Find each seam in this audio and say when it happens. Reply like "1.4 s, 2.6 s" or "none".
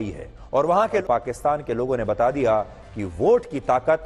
1.0 s